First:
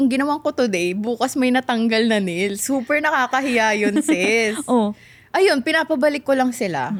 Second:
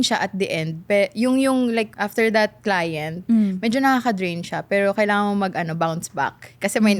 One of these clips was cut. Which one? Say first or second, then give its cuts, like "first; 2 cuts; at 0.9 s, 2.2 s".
second; 1 cut; at 1.9 s